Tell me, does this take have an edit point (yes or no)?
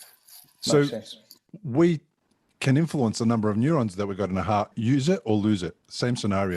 yes